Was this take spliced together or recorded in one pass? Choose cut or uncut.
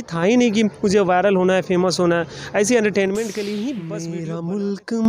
cut